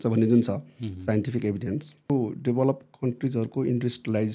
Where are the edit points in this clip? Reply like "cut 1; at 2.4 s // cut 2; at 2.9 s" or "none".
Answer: cut 1; at 2.1 s